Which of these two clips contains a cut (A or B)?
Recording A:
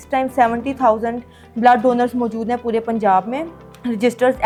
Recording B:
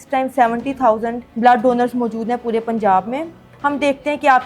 B